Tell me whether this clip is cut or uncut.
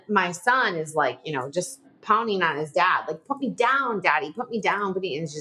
uncut